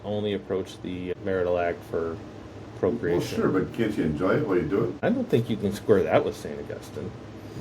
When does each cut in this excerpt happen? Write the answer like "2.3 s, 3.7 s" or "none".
1.1 s, 4.9 s